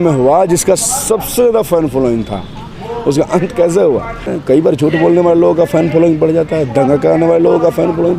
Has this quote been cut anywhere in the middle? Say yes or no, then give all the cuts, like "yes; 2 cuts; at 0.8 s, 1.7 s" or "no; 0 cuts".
yes; 1 cut; at 4.3 s